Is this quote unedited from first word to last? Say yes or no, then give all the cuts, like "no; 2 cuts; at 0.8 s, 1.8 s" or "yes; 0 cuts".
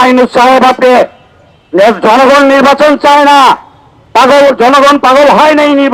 yes; 0 cuts